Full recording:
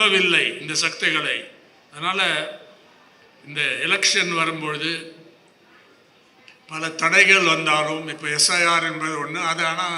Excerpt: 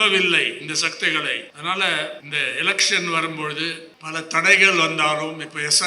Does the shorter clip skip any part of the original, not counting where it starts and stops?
yes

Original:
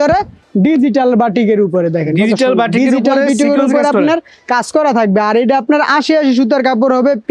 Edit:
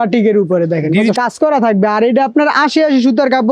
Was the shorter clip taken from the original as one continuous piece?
no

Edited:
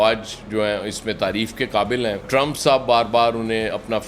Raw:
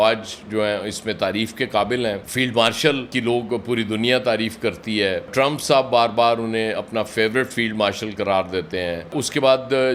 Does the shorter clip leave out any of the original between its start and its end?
yes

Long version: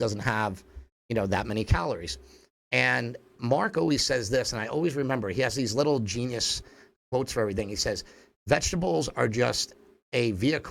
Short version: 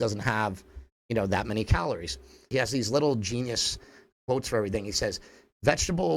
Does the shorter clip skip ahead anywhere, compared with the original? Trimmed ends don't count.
yes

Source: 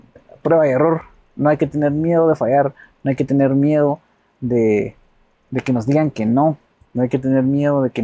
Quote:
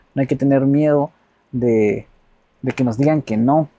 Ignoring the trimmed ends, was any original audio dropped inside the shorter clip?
no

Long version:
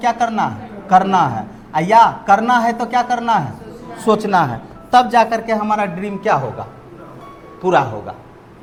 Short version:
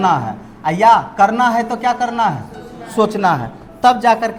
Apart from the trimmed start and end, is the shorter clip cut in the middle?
no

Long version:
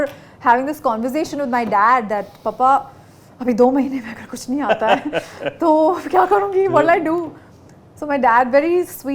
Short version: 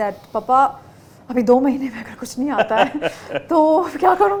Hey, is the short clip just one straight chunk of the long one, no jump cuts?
yes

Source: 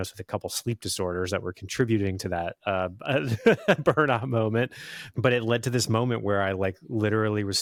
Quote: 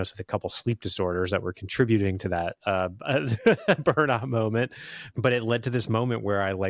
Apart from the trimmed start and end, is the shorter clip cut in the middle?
no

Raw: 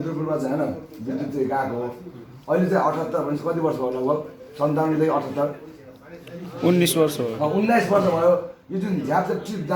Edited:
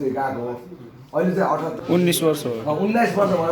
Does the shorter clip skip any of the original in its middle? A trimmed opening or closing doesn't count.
yes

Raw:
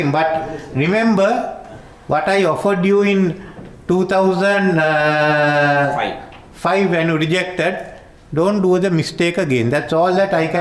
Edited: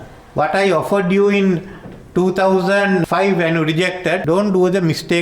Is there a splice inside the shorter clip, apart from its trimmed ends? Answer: yes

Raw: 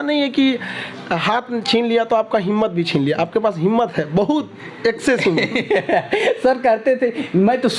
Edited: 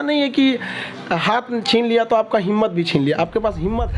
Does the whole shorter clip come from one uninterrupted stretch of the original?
yes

